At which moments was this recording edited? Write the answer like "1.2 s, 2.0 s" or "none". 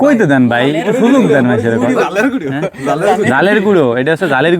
none